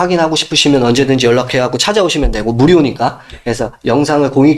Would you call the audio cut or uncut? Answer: uncut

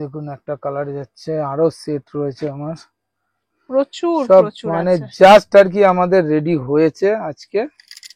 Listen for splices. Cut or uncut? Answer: uncut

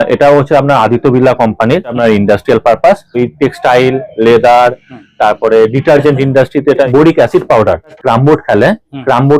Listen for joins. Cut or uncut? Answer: cut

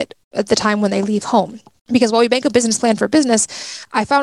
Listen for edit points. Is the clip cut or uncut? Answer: uncut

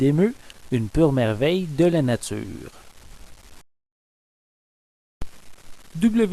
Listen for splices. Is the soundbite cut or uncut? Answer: uncut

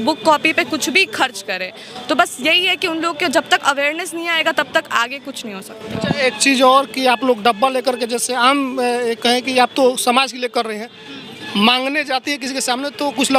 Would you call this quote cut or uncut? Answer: uncut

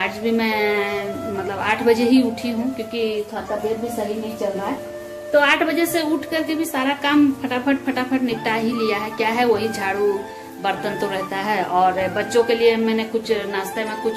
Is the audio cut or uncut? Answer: uncut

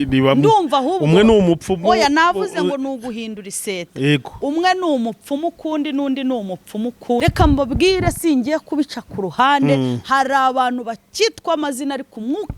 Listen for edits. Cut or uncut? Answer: cut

